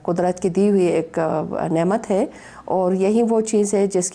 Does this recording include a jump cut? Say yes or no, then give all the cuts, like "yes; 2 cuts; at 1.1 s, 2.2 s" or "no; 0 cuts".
no; 0 cuts